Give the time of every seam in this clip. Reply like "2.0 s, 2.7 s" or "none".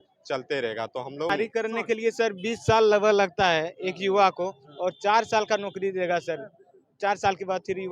1.3 s